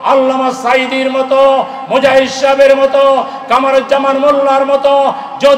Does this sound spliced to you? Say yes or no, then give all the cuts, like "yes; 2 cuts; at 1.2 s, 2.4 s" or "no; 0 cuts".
no; 0 cuts